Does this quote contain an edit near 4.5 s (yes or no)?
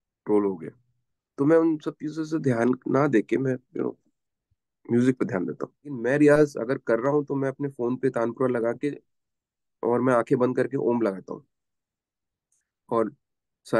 no